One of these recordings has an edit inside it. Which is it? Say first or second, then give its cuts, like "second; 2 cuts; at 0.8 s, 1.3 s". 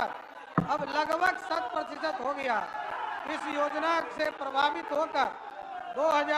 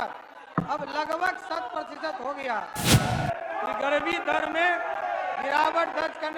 second; 1 cut; at 2.9 s